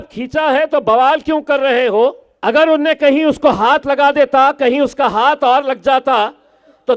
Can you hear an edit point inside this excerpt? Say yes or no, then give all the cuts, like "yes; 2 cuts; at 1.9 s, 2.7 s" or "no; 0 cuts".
yes; 1 cut; at 2.3 s